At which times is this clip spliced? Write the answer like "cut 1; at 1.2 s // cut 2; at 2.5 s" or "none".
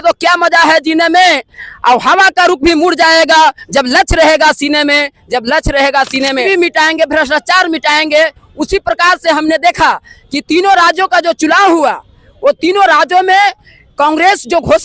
cut 1; at 6.4 s